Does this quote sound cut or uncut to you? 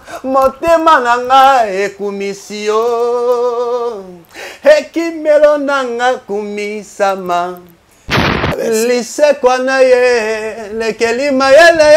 cut